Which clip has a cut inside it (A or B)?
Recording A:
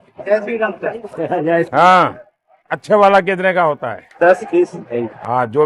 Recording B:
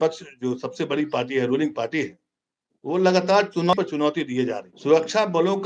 B